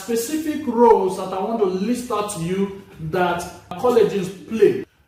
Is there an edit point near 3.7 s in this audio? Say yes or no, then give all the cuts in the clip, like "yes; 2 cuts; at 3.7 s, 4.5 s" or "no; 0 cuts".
yes; 1 cut; at 3.7 s